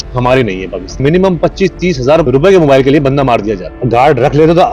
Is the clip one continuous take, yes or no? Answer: no